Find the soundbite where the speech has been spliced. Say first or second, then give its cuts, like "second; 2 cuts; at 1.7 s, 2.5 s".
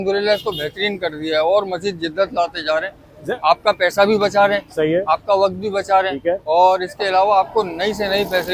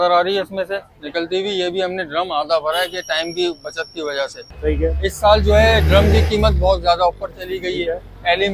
second; 1 cut; at 4.5 s